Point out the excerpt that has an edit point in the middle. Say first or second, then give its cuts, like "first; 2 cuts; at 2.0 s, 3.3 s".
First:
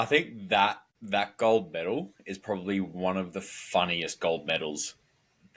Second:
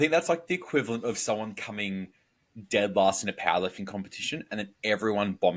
first; 1 cut; at 0.9 s